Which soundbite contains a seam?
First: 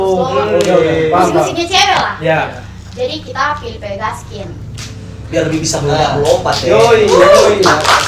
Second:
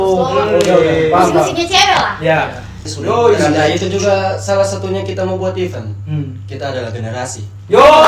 second; 1 cut; at 2.8 s

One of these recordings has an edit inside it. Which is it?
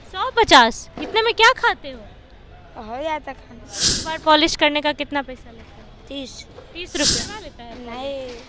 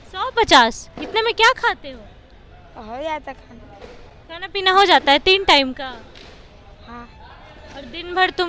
first; 2 cuts; at 3.9 s, 7.2 s

